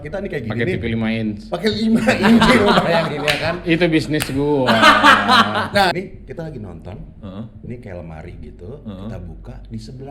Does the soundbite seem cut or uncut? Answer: cut